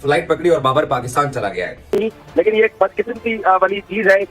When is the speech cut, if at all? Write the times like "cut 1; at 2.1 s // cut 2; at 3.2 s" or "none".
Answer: cut 1; at 1.8 s